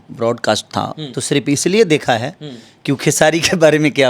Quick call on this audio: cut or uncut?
cut